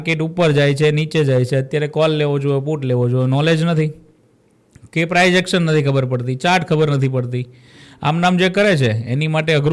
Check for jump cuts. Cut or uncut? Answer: uncut